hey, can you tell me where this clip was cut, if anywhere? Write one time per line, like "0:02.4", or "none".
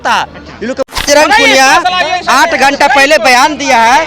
0:01.1